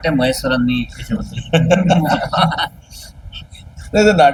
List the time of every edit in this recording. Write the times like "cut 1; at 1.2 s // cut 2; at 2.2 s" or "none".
none